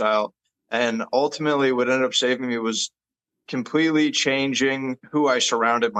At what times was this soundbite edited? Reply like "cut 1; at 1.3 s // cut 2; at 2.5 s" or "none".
cut 1; at 5.0 s